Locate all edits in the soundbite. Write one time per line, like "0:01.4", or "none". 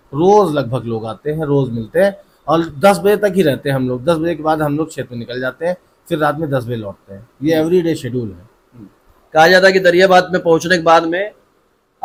none